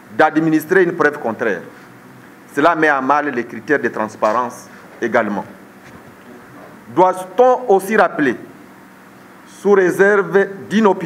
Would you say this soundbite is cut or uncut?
uncut